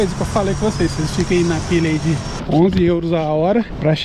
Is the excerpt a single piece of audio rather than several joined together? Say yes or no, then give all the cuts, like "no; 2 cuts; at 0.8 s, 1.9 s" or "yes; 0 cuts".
no; 1 cut; at 2.4 s